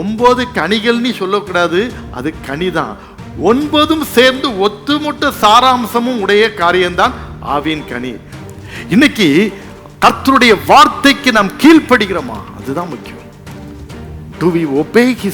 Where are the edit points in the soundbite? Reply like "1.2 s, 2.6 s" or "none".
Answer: 8.3 s